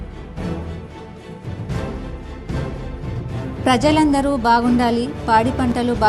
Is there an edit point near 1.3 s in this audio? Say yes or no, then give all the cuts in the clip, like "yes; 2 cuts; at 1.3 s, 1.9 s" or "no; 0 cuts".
yes; 1 cut; at 1.3 s